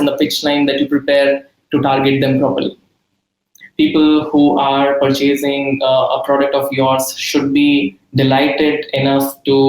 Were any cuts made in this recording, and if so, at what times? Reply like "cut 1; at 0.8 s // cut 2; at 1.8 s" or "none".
cut 1; at 3.5 s